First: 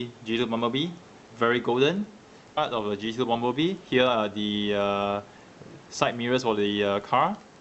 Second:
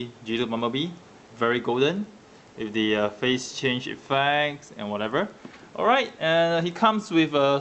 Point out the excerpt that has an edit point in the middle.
second; 1 cut; at 2.5 s

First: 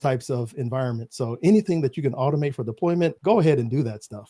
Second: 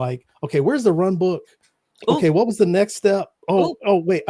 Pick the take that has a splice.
first; 1 cut; at 3.2 s

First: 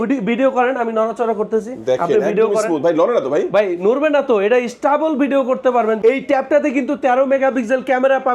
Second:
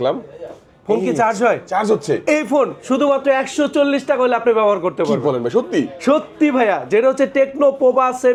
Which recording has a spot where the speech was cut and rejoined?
first; 1 cut; at 6.0 s

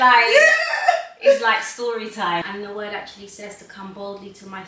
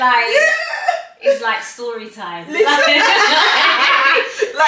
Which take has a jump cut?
first; 1 cut; at 2.4 s

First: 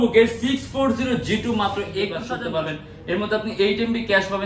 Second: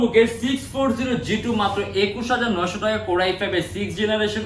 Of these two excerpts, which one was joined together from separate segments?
first; 1 cut; at 2.2 s

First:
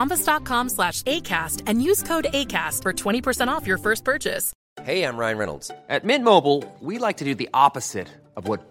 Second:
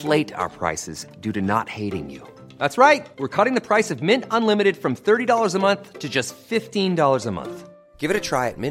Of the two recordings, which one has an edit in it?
first; 1 cut; at 4.5 s

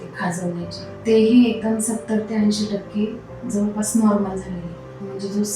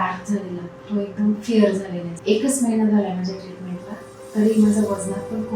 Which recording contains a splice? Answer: second; 1 cut; at 2.0 s

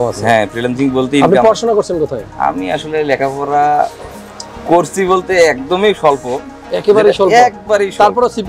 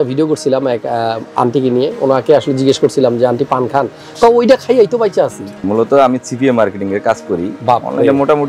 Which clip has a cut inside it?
second; 1 cut; at 5.6 s

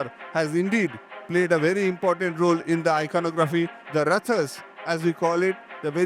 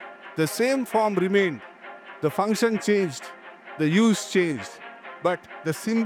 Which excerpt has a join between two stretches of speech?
first; 1 cut; at 3.8 s

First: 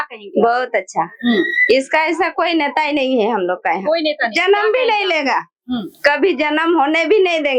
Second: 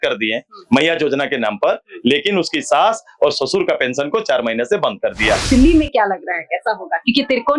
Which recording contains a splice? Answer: second; 1 cut; at 5.4 s

